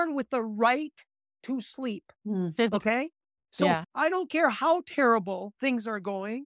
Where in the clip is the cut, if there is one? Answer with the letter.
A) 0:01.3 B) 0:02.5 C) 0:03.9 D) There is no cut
C